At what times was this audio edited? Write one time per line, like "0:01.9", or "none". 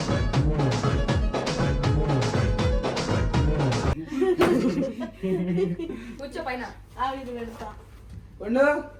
none